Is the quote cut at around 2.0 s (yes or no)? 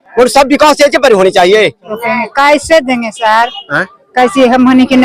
yes